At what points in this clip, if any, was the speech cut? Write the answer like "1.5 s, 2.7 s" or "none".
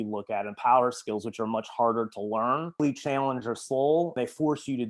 2.8 s, 4.1 s